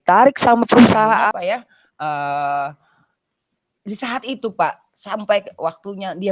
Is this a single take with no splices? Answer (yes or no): no